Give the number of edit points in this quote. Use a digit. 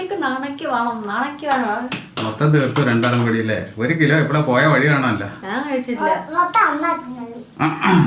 0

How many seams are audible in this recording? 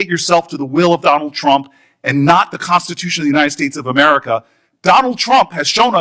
0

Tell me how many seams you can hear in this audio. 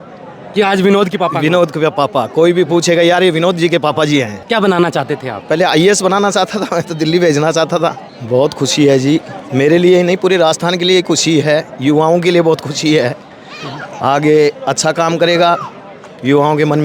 2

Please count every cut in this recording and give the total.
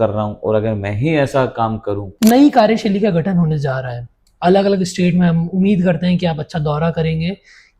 1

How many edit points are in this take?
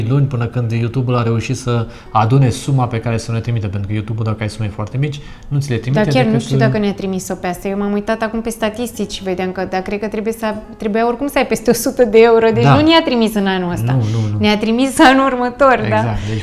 0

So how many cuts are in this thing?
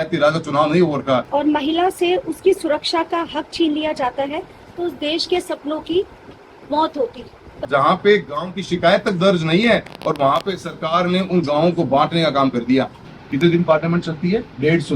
3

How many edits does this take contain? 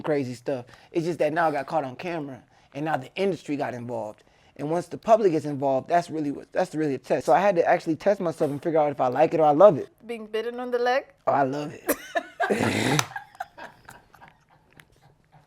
2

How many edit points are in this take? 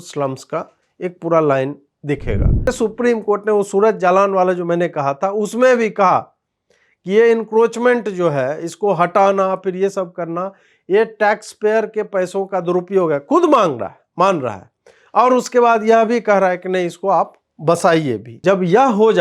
2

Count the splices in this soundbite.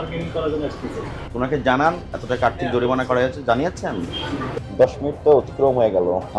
1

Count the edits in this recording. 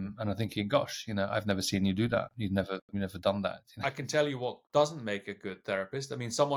1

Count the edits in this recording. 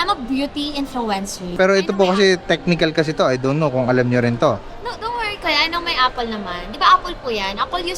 1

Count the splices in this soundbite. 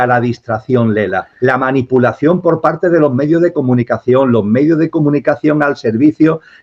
1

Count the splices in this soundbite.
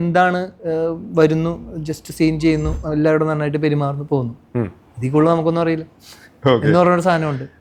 0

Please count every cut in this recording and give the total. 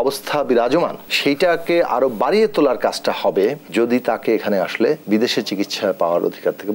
3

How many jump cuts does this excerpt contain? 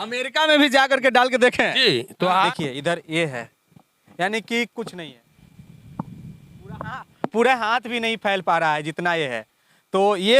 1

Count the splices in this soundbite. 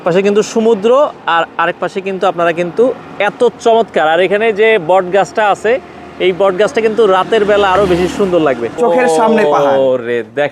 1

